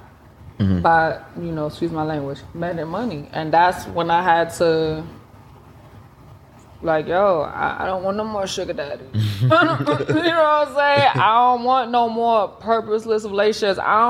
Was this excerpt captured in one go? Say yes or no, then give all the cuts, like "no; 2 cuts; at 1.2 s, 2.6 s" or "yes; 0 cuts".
yes; 0 cuts